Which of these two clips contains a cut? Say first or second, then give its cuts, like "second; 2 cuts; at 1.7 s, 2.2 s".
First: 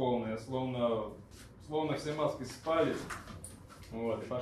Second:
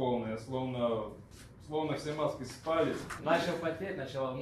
second; 1 cut; at 3.1 s